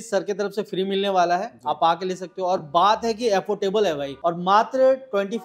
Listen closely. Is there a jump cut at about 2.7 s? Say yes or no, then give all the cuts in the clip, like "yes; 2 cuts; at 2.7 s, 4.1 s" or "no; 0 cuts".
no; 1 cut; at 4.1 s